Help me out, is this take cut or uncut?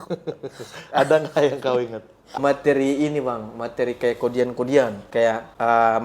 cut